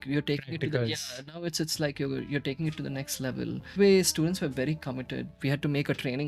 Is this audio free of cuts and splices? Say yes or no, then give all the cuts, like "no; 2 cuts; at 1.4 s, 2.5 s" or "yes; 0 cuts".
no; 1 cut; at 3.7 s